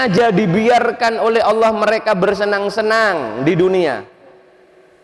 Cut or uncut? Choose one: uncut